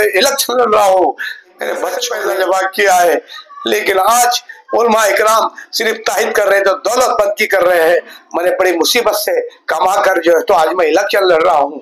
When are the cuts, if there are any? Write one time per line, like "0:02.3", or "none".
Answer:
0:02.1